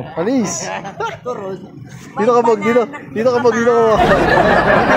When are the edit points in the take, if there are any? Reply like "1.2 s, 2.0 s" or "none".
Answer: 4.0 s